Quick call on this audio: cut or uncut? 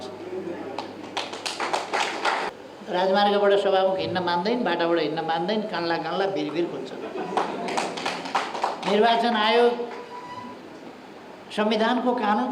cut